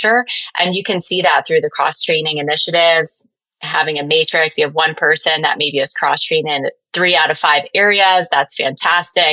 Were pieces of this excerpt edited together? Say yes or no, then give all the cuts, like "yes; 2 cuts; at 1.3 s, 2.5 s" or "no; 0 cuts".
yes; 1 cut; at 6.8 s